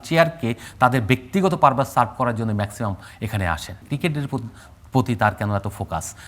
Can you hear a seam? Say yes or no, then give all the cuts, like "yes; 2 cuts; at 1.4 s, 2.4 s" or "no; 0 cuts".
yes; 1 cut; at 3.8 s